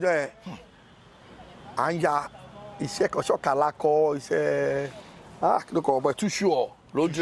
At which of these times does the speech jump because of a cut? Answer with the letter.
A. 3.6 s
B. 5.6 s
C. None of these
C